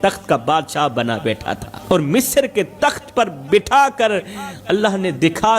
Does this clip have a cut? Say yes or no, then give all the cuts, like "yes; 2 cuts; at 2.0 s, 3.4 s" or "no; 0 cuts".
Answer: yes; 1 cut; at 1.7 s